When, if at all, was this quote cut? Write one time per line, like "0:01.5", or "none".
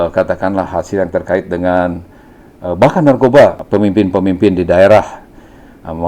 0:03.6